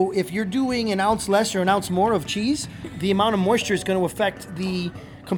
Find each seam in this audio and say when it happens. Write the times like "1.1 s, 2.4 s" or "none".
2.9 s